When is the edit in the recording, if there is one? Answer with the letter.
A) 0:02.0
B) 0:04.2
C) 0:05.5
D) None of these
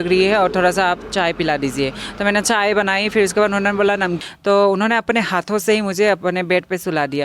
B